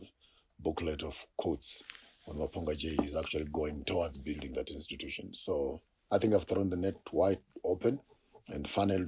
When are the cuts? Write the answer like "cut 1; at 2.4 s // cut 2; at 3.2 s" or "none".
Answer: none